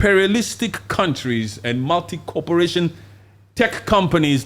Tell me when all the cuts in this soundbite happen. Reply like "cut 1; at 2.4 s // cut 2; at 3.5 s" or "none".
none

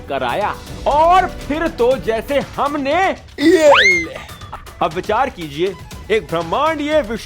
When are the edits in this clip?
cut 1; at 4.4 s

